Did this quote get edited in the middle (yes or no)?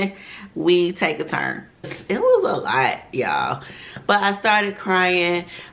yes